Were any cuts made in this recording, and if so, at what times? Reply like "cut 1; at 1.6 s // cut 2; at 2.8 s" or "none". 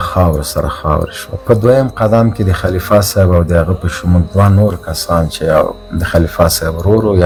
none